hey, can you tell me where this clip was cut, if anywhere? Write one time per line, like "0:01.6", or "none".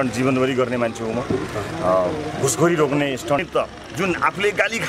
0:03.4